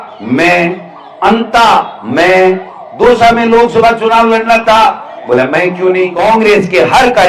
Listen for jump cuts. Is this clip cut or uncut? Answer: cut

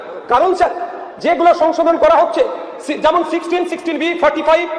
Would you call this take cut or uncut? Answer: uncut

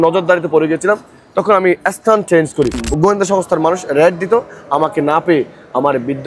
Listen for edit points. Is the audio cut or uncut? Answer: cut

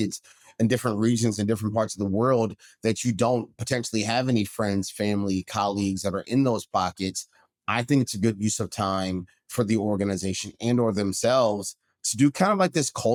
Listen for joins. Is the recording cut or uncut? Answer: uncut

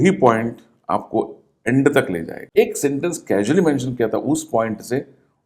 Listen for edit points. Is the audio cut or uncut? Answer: cut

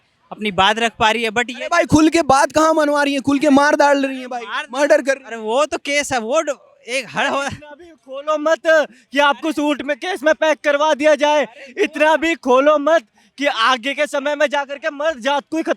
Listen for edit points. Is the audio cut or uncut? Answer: uncut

